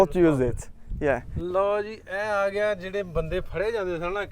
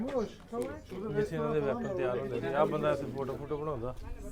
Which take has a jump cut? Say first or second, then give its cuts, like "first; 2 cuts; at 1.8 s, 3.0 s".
first; 1 cut; at 1.3 s